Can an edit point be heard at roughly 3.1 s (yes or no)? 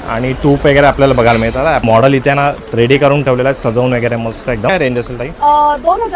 no